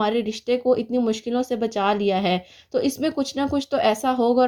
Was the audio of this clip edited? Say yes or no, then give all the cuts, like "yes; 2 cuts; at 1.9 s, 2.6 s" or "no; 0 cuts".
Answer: no; 0 cuts